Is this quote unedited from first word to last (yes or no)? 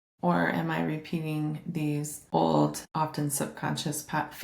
no